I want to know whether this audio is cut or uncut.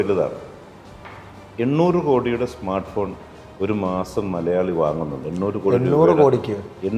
uncut